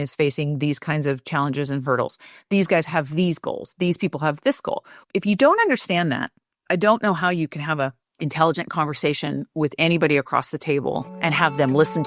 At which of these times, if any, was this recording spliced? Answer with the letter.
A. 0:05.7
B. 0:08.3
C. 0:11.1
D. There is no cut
C